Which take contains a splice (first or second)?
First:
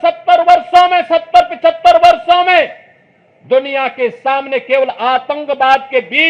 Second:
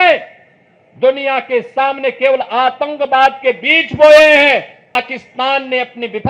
second